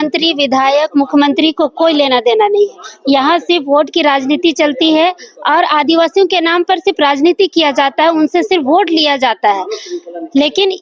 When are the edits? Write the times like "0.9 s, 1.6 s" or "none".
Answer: none